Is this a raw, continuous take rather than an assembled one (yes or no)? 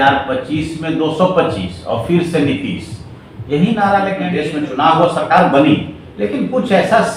no